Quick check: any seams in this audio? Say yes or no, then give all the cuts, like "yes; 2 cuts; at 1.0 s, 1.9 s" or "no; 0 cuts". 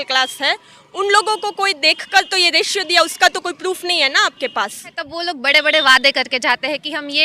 yes; 1 cut; at 5.0 s